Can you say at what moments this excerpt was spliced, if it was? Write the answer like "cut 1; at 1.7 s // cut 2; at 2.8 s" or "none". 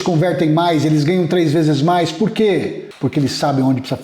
cut 1; at 2.8 s